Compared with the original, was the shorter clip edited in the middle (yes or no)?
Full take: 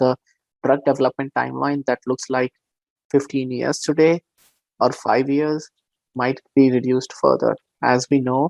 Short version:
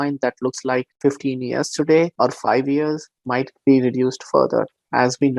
yes